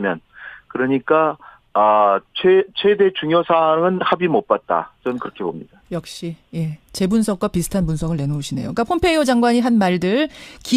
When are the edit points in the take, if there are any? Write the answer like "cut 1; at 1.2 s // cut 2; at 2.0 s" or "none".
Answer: cut 1; at 1.1 s